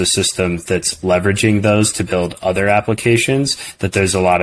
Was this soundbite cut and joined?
no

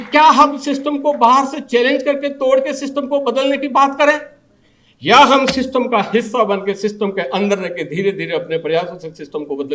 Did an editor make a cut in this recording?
no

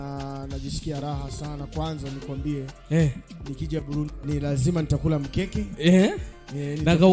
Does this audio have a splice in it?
yes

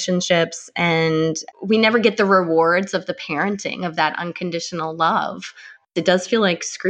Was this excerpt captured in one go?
no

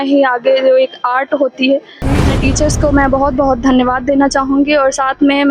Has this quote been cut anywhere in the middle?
yes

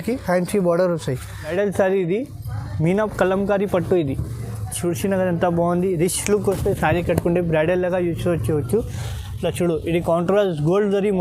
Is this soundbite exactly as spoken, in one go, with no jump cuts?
no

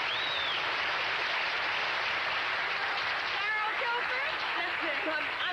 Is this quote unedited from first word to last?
yes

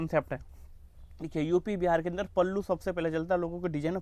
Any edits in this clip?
no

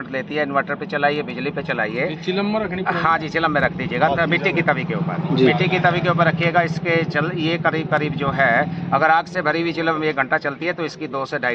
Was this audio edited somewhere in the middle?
no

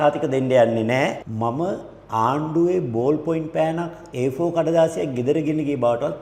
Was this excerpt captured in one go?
no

